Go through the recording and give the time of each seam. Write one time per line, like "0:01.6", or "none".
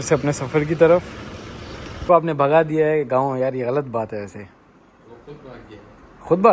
0:02.1